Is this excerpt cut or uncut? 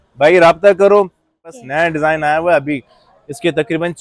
cut